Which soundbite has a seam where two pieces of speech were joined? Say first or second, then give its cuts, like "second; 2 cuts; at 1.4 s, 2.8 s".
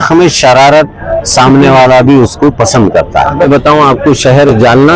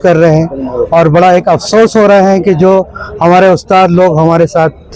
first; 1 cut; at 3.5 s